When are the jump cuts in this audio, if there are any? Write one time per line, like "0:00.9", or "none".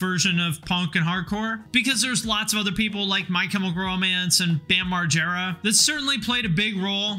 none